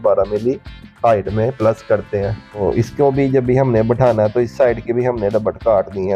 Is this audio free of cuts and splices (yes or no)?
no